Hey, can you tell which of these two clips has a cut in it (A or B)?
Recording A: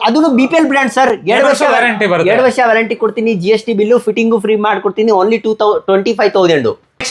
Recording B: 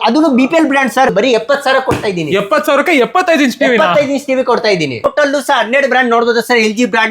B